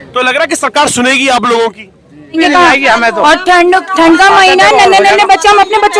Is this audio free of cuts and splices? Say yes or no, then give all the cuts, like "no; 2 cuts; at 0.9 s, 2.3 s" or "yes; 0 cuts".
no; 1 cut; at 2.4 s